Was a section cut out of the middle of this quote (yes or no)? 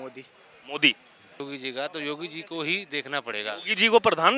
yes